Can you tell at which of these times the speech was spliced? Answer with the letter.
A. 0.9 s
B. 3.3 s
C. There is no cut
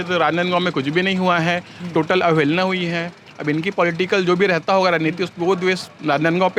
C